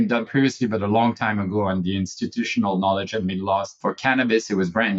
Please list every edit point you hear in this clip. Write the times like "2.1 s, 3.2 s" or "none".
3.7 s